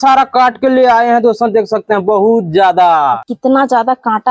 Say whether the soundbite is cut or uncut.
cut